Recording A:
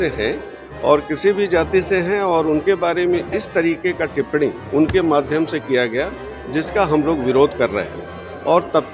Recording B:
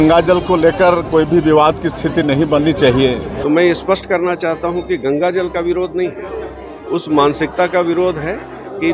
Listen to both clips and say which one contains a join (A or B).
B